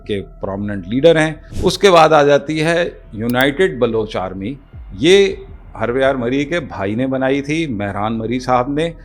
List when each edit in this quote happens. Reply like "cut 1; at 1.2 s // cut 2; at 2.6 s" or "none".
cut 1; at 1.4 s